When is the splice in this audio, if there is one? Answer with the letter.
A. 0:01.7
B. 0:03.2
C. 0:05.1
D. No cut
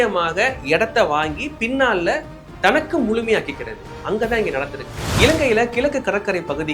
C